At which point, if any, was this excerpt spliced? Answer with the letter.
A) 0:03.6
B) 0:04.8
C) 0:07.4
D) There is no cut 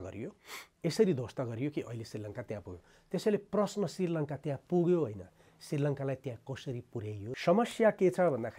C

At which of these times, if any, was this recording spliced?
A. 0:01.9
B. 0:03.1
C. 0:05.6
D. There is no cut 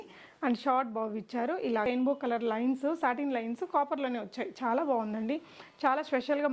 A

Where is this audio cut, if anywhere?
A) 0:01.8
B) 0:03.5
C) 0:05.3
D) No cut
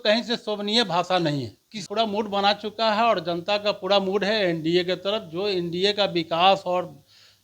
A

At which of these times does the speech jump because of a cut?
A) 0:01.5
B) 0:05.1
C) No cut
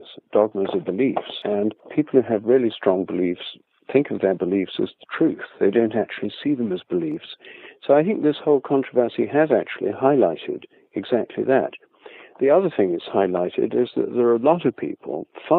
A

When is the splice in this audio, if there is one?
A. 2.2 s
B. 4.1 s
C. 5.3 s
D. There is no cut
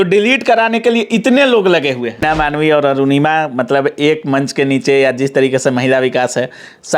A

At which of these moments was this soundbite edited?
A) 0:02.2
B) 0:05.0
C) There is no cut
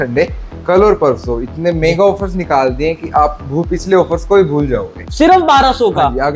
B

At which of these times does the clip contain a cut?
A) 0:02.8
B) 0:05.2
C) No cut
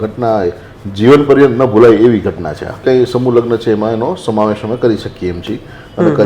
A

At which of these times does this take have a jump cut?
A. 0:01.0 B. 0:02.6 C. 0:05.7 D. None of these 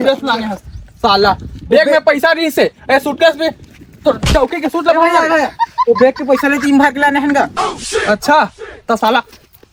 D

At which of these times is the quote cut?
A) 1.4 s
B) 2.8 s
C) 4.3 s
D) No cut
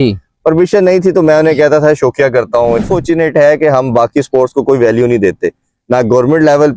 B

